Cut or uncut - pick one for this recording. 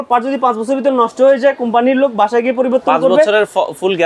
uncut